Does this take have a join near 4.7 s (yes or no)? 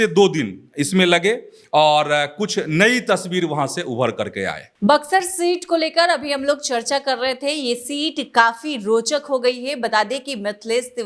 no